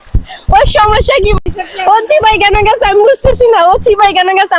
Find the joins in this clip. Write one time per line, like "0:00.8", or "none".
0:01.5